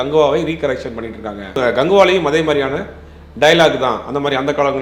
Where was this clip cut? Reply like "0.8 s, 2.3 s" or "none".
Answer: 1.7 s